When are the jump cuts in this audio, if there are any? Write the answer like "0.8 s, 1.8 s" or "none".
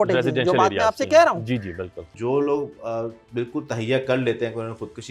2.1 s